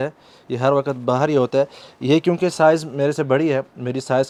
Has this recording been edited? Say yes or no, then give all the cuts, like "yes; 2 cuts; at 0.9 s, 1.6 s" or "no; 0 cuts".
no; 0 cuts